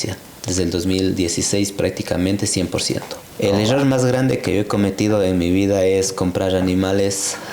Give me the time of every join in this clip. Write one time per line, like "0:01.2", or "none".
0:03.2